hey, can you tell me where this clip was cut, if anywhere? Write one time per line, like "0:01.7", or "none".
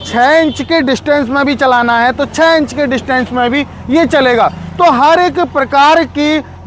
none